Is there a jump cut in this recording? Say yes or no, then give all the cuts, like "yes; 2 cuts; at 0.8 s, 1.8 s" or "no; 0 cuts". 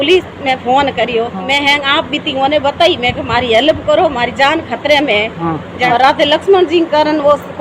yes; 2 cuts; at 1.5 s, 5.7 s